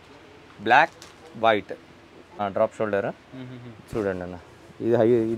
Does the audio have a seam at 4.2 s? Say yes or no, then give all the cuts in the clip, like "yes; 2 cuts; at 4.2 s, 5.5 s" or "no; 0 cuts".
no; 1 cut; at 2.3 s